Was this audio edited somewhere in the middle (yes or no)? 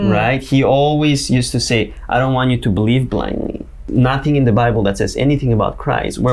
yes